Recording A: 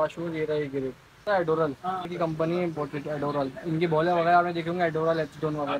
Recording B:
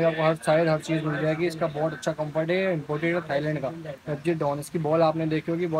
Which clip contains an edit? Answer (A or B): A